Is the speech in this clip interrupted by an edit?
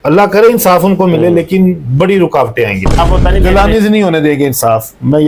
yes; 1 cut; at 3.0 s

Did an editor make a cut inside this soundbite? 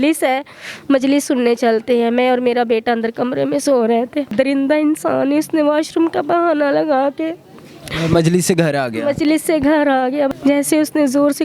yes; 2 cuts; at 4.3 s, 10.3 s

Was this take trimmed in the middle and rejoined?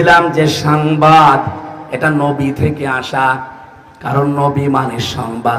no; 0 cuts

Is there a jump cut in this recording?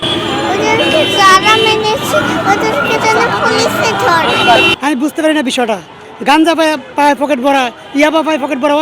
yes; 1 cut; at 4.7 s

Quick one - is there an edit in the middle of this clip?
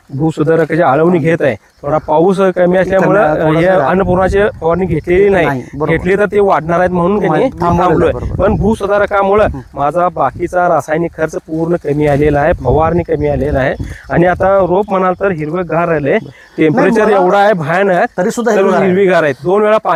no; 0 cuts

